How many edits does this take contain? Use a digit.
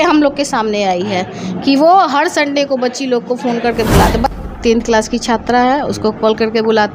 1